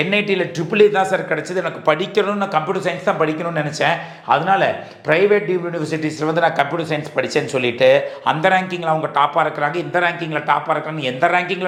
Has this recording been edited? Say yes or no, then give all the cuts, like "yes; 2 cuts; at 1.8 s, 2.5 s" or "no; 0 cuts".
no; 0 cuts